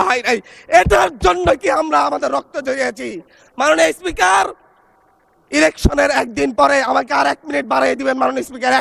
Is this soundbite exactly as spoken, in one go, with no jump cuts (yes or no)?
yes